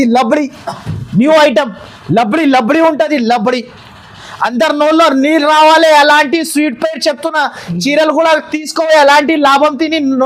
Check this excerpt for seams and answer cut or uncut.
uncut